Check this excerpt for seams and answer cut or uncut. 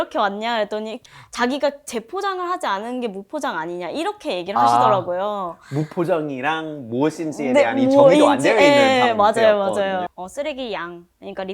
cut